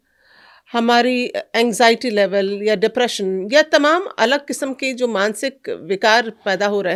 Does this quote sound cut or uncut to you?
uncut